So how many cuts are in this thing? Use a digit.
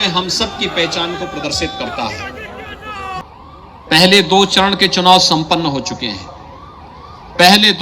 1